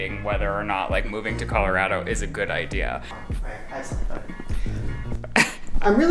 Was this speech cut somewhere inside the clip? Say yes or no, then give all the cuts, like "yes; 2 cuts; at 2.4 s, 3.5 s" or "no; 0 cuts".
yes; 1 cut; at 3.1 s